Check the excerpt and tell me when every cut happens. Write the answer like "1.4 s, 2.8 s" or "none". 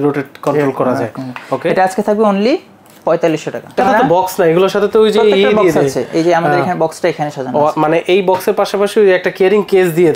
3.7 s